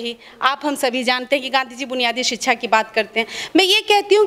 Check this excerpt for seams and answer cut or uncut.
uncut